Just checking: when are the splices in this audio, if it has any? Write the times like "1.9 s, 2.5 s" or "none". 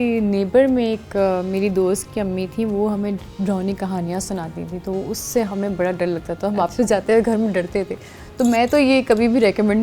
none